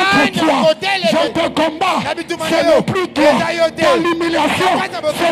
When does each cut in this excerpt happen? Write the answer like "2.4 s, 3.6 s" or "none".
1.2 s